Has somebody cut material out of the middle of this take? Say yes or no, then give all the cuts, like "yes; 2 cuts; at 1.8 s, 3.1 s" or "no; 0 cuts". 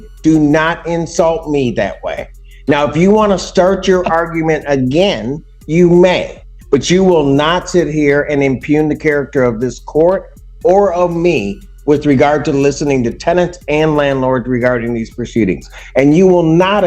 no; 0 cuts